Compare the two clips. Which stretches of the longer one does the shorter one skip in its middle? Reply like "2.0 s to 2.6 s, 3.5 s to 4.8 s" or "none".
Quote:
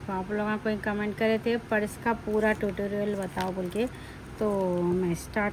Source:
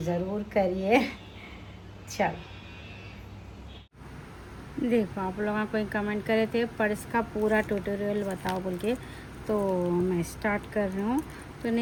none

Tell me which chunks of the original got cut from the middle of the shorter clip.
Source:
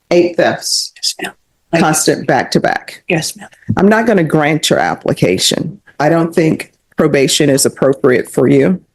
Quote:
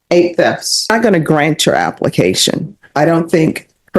0.9 s to 3.9 s

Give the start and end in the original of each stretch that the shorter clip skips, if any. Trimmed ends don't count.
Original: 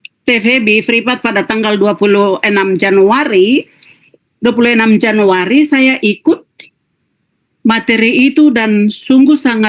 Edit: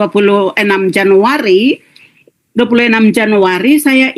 none

